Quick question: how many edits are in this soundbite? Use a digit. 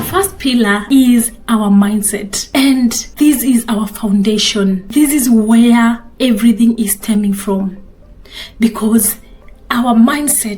4